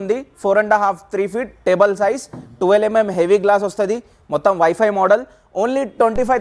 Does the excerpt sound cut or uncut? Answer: uncut